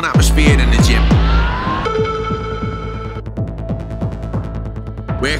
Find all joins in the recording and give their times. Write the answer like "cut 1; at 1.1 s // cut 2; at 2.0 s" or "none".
none